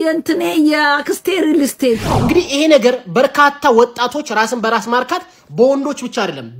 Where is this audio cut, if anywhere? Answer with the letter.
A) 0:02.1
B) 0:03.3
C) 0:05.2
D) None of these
A